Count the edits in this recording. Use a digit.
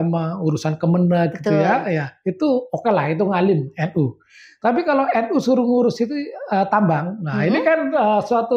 0